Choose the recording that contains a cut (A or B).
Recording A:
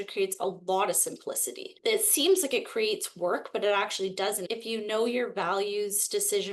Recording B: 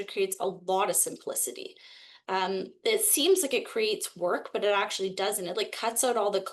A